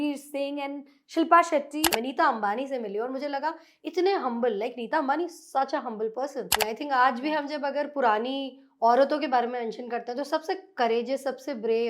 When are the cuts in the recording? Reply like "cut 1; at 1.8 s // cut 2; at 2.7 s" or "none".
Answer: cut 1; at 1.9 s // cut 2; at 6.6 s